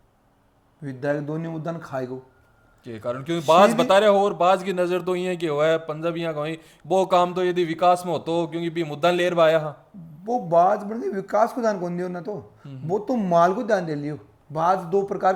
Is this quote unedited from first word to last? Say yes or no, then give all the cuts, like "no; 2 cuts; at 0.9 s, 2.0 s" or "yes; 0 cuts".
yes; 0 cuts